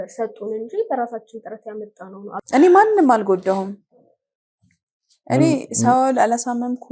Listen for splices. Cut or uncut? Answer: cut